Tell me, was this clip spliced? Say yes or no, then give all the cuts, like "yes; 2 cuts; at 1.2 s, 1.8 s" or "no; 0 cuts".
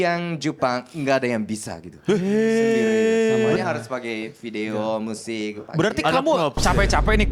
no; 0 cuts